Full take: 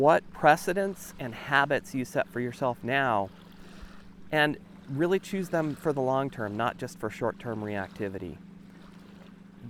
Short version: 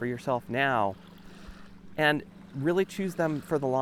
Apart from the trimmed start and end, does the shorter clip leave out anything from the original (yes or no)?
no